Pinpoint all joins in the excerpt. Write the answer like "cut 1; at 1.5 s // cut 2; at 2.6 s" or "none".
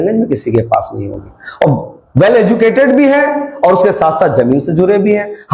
none